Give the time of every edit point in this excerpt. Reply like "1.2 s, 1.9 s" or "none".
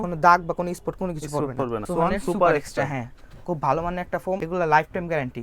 1.8 s, 4.4 s